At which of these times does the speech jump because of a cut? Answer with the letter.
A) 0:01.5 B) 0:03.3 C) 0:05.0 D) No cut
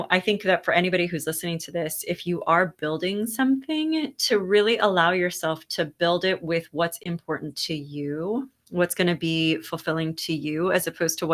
D